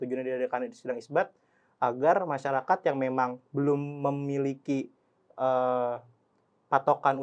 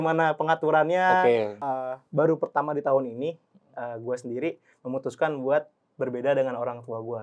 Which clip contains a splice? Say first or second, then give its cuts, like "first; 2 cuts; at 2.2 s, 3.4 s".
second; 1 cut; at 1.6 s